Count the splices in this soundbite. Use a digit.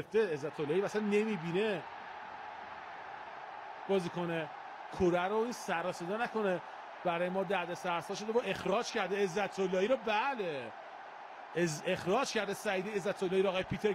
0